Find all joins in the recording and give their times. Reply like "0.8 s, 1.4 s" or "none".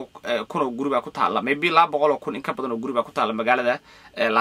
none